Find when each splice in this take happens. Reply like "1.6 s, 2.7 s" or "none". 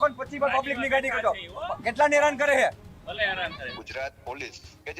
3.7 s